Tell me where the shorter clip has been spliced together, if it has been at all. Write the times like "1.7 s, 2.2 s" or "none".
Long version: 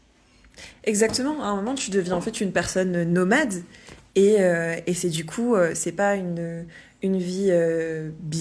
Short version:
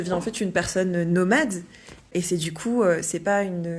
2.0 s